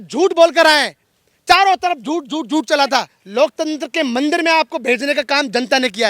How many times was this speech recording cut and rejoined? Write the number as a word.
one